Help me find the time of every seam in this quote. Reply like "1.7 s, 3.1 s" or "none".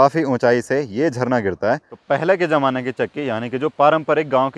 1.9 s